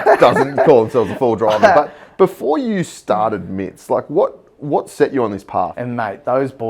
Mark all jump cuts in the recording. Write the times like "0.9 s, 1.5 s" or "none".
5.7 s